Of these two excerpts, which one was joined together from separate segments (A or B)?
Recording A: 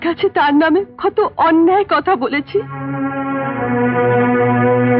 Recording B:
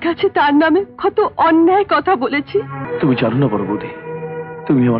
B